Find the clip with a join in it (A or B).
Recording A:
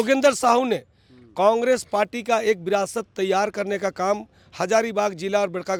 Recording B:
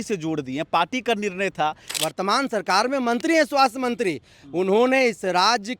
B